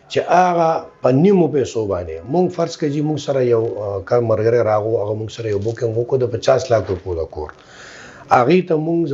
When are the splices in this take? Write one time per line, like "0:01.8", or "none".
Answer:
none